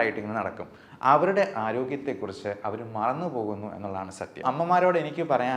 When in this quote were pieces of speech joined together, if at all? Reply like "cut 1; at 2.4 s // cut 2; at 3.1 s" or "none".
cut 1; at 4.4 s